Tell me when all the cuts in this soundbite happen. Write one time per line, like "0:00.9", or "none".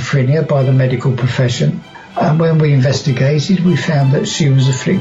0:01.9